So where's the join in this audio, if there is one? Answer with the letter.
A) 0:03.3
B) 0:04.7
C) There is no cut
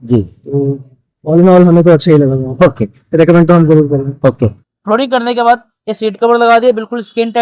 B